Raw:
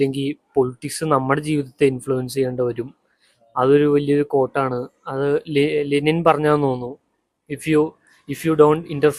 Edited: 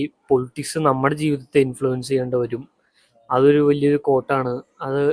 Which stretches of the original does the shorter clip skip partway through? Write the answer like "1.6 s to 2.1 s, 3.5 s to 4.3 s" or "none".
none

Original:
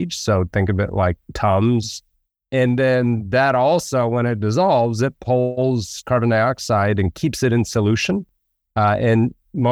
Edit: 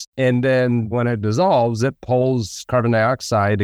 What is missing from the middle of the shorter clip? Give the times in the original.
3.3 s to 4.1 s, 5.4 s to 5.6 s

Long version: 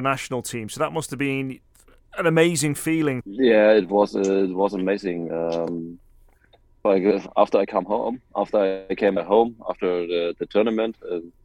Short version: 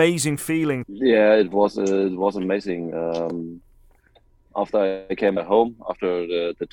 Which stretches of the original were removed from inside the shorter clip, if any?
6.7 s to 8.2 s

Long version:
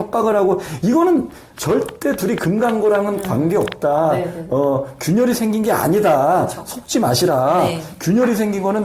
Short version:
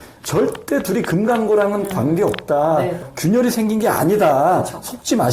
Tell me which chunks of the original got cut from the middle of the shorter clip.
4.4 s to 4.9 s

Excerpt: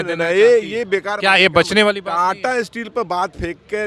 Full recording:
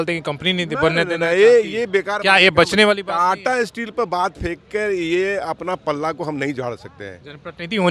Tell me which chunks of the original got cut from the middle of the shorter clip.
none

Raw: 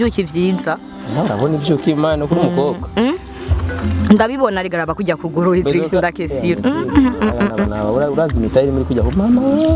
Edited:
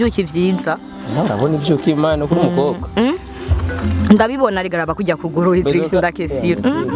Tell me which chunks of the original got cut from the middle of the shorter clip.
none

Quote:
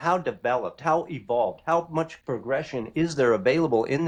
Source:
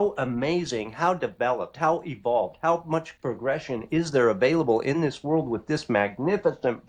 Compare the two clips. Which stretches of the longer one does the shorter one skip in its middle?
none

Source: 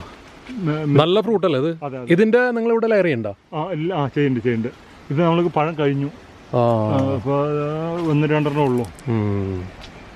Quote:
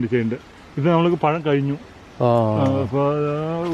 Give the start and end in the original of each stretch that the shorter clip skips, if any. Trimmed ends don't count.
none

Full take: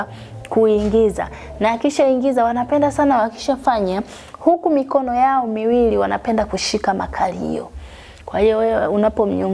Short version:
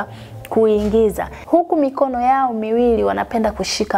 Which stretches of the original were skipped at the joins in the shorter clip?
1.3 s to 4.2 s

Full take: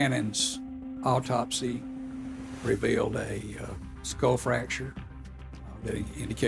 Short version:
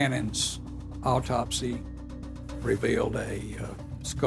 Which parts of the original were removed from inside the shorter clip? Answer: none

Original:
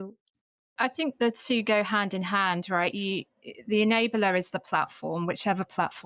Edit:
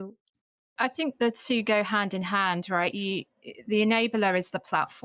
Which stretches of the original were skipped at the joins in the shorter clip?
none

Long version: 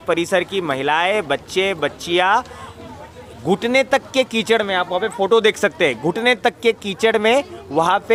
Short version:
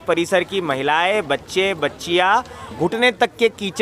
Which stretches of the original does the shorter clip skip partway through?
2.7 s to 6.0 s

